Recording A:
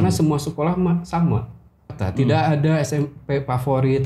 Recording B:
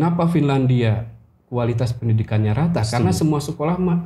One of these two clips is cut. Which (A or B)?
A